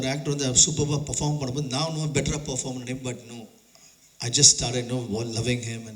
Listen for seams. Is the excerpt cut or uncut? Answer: uncut